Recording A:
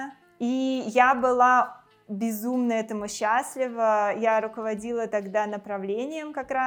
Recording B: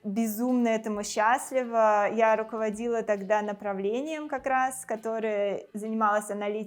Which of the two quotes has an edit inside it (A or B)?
B